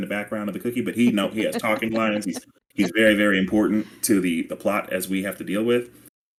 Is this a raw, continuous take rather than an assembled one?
yes; 0 cuts

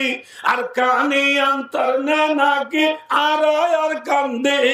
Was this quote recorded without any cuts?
yes; 0 cuts

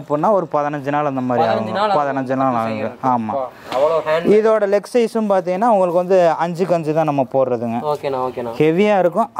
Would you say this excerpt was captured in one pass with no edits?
yes; 0 cuts

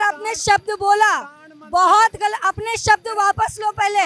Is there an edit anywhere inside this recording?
no; 0 cuts

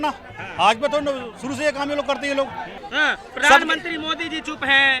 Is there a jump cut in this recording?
yes; 1 cut; at 2.7 s

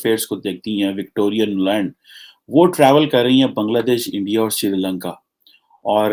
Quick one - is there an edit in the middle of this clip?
no; 0 cuts

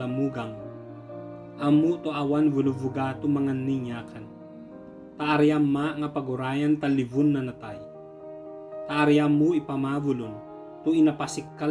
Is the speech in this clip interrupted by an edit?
no; 0 cuts

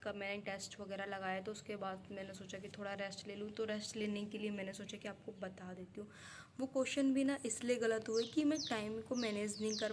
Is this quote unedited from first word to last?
yes; 0 cuts

